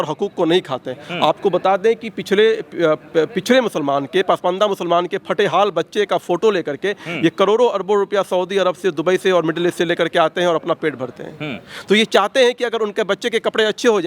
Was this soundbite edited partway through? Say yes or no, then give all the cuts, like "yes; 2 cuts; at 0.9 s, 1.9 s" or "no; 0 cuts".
no; 0 cuts